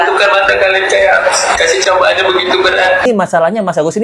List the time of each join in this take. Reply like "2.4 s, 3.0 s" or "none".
3.0 s